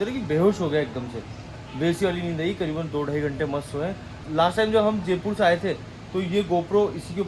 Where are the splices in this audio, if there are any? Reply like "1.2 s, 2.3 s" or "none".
4.1 s

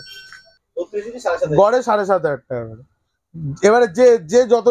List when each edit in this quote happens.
none

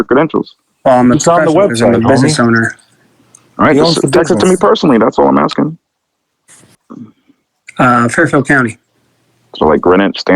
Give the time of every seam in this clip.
6.8 s

